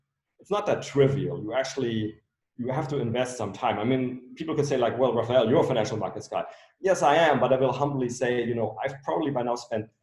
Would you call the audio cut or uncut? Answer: uncut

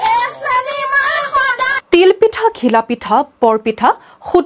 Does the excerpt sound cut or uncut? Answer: uncut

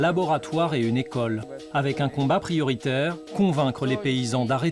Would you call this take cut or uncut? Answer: cut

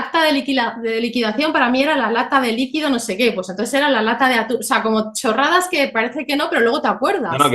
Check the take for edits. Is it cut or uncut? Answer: uncut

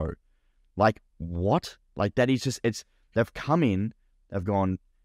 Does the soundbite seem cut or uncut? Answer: uncut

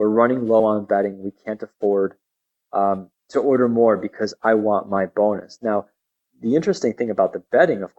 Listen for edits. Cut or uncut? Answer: uncut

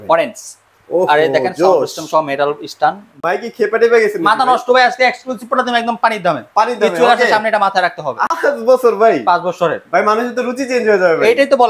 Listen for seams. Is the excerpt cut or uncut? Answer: cut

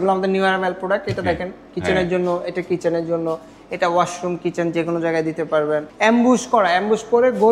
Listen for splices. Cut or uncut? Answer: cut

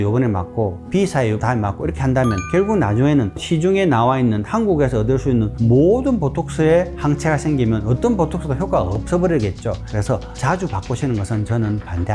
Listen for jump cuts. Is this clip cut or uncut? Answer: cut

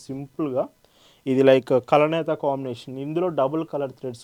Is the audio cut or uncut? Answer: uncut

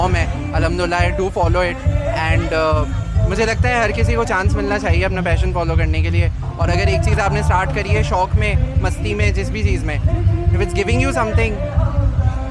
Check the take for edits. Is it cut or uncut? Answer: uncut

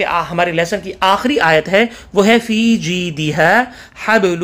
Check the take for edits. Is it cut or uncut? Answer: uncut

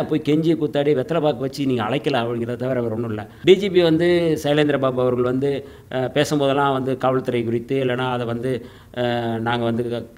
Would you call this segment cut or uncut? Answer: cut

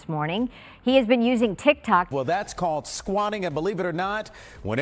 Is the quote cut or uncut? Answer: cut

